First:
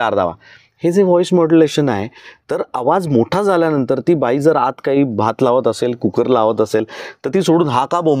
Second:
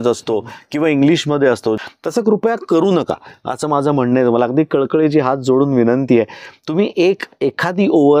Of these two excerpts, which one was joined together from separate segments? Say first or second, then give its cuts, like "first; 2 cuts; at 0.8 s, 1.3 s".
second; 1 cut; at 1.8 s